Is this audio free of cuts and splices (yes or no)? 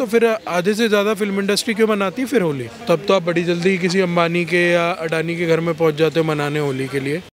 yes